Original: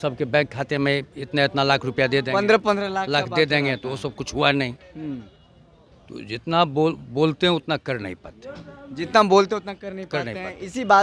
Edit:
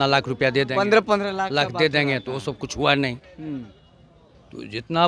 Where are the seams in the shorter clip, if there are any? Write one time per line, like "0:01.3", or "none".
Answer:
none